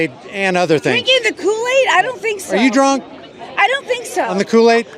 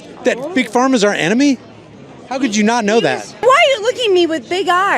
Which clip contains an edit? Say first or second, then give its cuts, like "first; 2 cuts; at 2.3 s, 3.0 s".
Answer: second; 1 cut; at 3.4 s